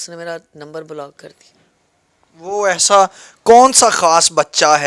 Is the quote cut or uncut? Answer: uncut